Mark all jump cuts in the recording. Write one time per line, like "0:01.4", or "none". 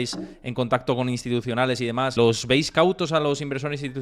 0:02.1